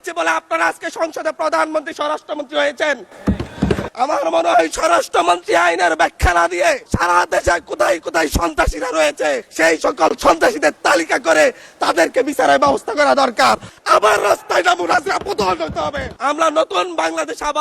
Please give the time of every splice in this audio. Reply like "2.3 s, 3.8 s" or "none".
3.9 s, 6.9 s, 9.5 s, 13.7 s, 16.1 s